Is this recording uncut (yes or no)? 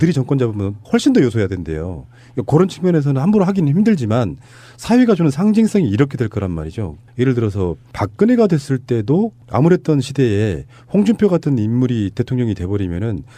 no